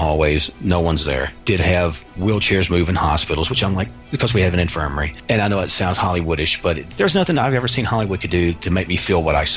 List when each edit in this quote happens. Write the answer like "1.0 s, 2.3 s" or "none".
1.3 s, 2.1 s, 5.1 s, 6.9 s